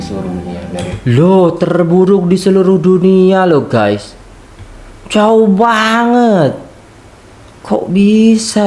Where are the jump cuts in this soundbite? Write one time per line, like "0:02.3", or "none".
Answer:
none